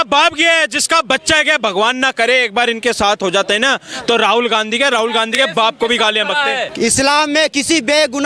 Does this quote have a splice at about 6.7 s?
yes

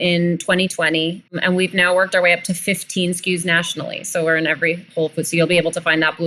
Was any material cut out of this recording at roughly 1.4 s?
yes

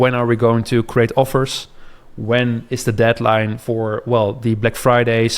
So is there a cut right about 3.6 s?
yes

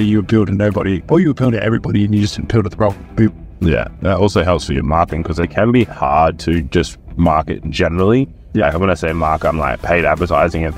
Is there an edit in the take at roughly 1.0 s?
yes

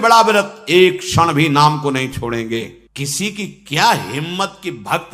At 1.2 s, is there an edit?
no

